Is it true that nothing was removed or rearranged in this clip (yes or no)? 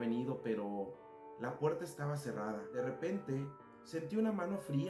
no